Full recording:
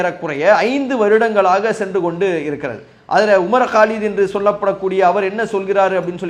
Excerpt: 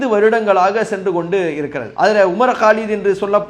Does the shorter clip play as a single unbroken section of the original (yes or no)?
no